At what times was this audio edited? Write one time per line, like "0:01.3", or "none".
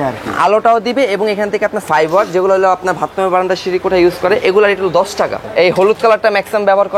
0:01.8
0:05.4